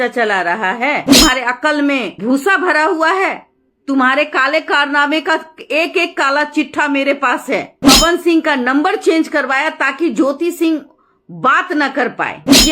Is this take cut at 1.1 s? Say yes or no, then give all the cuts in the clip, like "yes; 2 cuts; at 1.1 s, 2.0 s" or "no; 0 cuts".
yes; 2 cuts; at 1.1 s, 7.8 s